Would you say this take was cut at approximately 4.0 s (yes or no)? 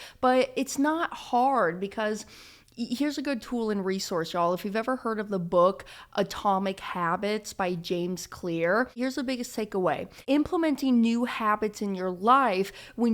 no